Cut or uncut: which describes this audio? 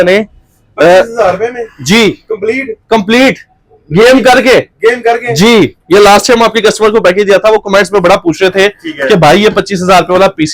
uncut